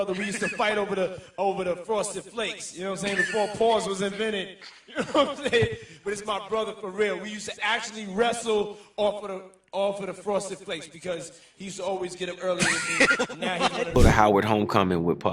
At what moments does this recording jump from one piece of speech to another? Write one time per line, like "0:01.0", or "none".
0:14.0